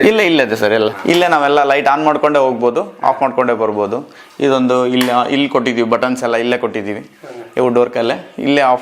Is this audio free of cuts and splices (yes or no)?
no